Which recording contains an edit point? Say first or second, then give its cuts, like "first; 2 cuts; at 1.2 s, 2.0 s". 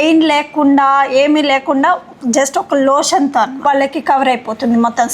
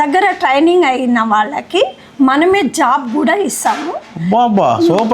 first; 1 cut; at 3.6 s